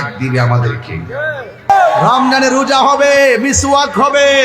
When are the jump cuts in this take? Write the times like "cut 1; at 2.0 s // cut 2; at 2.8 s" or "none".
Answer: cut 1; at 1.7 s